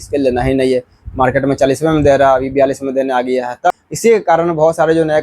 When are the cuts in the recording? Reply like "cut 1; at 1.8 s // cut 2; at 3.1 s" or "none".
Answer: cut 1; at 3.7 s